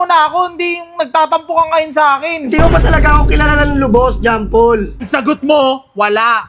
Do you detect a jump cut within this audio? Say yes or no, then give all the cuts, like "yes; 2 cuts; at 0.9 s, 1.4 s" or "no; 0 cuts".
yes; 1 cut; at 5.0 s